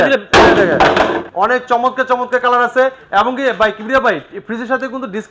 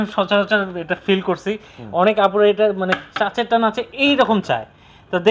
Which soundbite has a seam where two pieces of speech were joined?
first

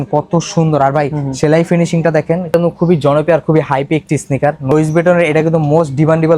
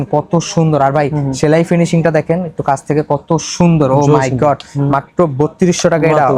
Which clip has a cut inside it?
first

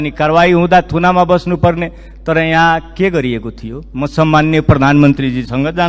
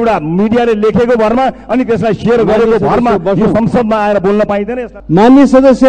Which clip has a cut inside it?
second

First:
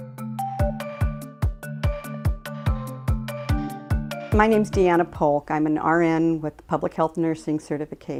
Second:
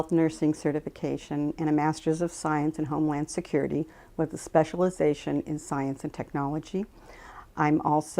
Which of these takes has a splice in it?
second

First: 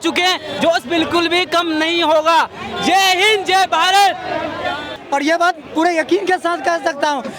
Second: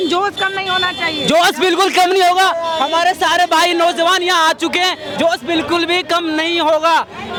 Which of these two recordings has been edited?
first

